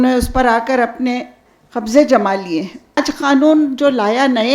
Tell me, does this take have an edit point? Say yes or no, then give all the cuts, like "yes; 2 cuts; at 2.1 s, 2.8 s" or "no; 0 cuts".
yes; 1 cut; at 3.0 s